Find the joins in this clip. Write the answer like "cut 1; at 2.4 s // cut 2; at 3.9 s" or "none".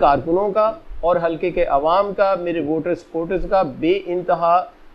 none